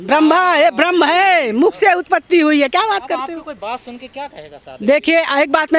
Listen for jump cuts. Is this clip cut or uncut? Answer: uncut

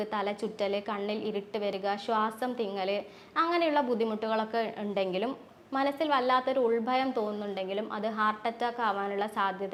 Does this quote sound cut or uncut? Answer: uncut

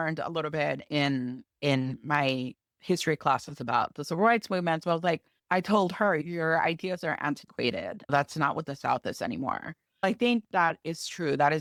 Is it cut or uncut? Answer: uncut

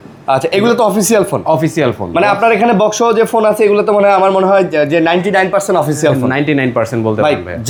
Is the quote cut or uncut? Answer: uncut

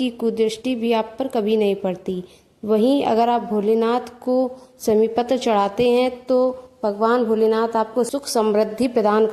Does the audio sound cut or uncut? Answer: cut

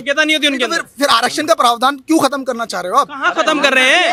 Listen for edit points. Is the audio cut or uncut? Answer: uncut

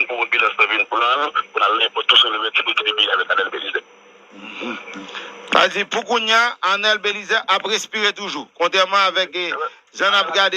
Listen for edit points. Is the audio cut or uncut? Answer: uncut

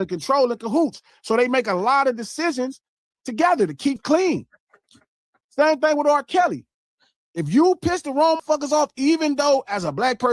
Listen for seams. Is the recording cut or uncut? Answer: cut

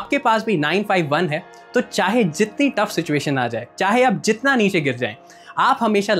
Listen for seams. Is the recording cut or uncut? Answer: uncut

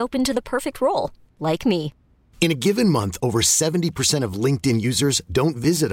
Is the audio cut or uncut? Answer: uncut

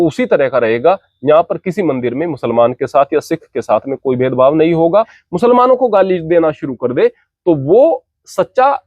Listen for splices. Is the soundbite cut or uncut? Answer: cut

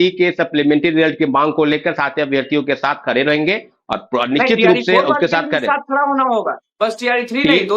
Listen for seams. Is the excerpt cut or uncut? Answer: uncut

